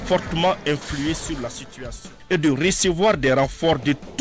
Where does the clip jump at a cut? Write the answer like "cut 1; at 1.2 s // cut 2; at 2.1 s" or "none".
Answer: cut 1; at 2.1 s